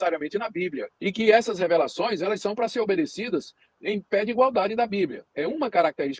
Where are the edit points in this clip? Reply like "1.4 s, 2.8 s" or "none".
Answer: 0.9 s, 5.3 s